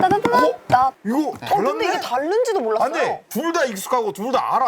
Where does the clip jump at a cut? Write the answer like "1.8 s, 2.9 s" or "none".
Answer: 1.0 s